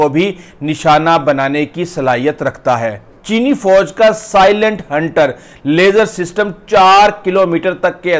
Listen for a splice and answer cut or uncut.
cut